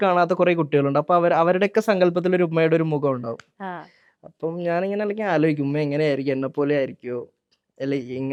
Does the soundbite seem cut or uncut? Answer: uncut